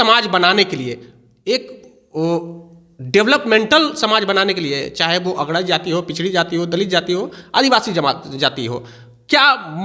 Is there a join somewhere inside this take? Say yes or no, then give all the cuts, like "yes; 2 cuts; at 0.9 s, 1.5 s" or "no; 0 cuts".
no; 0 cuts